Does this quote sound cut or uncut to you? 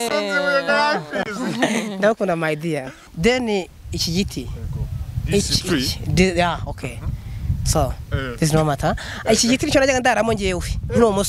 cut